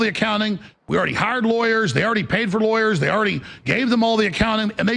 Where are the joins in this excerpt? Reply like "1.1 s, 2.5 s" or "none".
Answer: none